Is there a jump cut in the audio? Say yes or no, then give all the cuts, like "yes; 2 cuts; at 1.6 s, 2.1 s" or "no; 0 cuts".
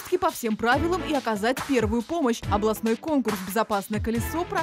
no; 0 cuts